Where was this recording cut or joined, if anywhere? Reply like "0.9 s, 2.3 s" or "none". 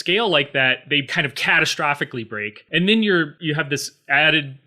2.6 s, 3.4 s